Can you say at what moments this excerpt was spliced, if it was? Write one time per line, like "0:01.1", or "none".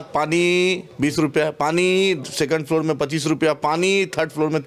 none